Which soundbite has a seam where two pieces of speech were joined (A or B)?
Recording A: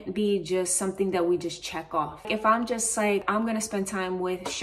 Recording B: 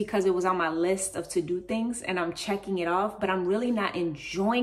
A